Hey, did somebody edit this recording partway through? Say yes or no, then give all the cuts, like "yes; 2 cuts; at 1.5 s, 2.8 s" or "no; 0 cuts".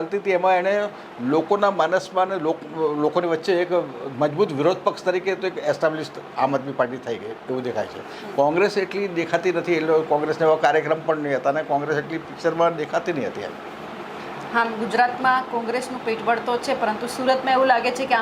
no; 0 cuts